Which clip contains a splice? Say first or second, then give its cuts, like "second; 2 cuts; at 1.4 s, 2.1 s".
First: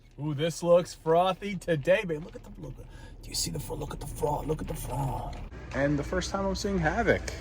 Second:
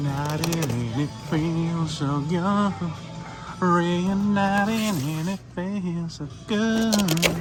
first; 1 cut; at 5.6 s